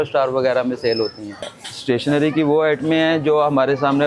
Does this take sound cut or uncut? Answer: cut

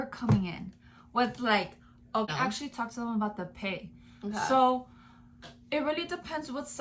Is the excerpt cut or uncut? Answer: cut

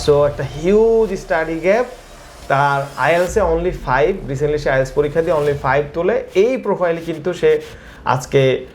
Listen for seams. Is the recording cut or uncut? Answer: uncut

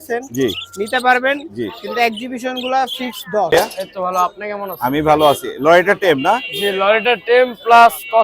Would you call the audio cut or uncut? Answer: cut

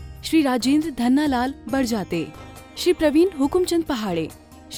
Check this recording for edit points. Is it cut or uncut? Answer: uncut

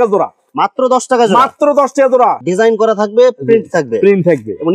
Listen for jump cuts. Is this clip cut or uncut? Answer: cut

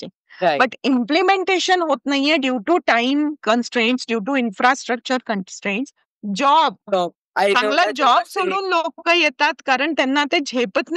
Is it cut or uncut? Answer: cut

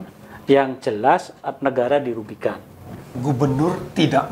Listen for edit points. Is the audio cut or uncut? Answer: cut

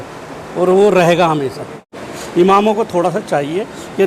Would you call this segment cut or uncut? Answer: cut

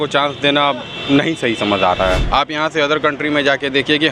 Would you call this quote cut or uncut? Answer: cut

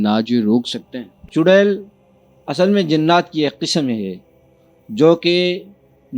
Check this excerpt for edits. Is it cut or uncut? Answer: cut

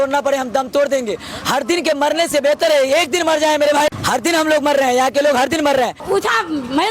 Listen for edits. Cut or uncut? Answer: cut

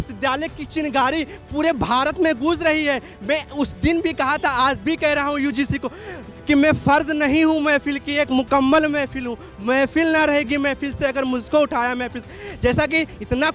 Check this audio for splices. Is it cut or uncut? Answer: uncut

